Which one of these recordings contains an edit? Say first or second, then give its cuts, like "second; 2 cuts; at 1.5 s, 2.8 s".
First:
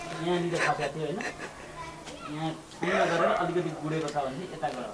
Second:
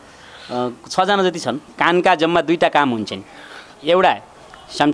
second; 1 cut; at 1.7 s